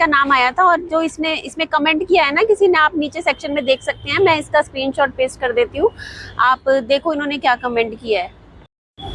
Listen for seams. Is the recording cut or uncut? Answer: uncut